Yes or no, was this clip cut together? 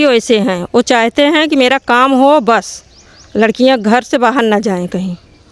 no